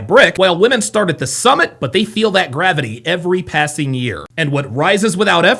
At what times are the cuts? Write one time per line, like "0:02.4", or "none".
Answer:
none